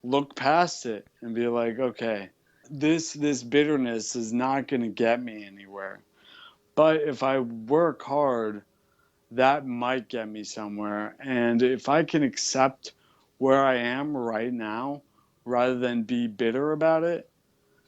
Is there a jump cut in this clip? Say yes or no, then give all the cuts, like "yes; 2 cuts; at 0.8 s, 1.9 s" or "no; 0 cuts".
yes; 1 cut; at 2.7 s